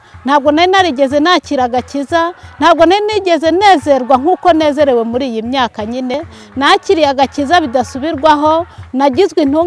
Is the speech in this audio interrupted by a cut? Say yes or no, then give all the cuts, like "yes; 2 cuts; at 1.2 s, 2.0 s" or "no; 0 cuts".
yes; 1 cut; at 6.1 s